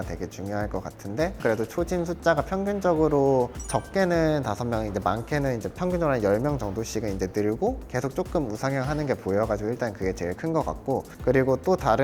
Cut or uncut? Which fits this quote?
cut